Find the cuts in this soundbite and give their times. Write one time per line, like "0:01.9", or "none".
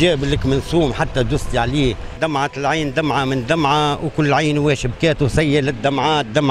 0:02.2